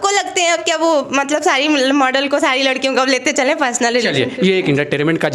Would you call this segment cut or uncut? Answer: uncut